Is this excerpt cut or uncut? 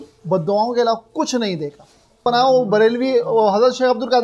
cut